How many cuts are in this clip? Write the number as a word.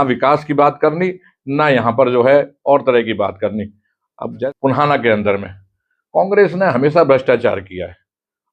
one